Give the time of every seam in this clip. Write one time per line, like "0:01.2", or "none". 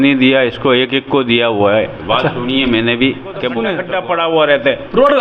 0:03.7